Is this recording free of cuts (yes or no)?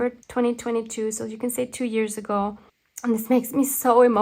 no